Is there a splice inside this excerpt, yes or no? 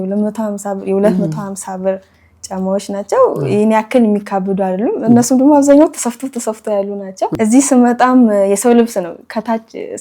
yes